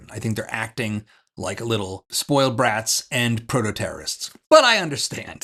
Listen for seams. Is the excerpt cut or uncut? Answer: uncut